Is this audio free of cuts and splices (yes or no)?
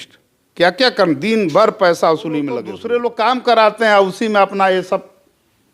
no